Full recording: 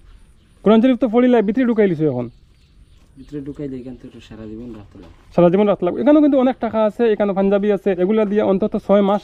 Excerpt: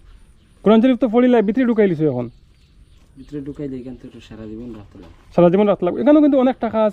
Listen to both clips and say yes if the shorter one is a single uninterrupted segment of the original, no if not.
yes